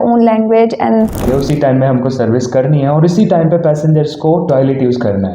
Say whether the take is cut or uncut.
cut